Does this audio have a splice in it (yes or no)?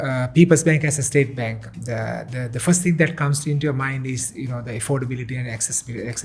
no